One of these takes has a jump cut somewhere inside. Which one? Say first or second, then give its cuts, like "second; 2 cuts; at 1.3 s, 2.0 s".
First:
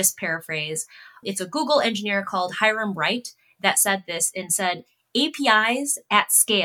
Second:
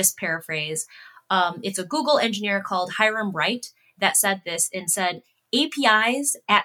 first; 1 cut; at 1.2 s